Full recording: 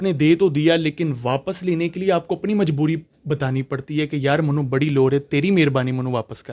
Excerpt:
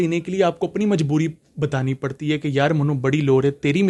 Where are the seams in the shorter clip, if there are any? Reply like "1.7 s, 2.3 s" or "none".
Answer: none